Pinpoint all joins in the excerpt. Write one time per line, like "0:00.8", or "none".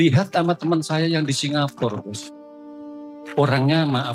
none